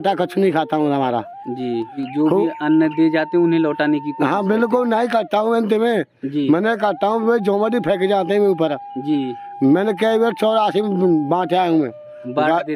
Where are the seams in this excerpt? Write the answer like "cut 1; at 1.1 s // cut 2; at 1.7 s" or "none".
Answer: cut 1; at 2.0 s